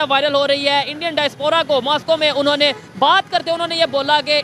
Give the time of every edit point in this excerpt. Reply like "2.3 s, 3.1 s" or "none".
none